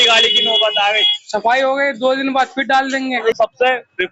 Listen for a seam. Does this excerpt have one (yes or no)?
yes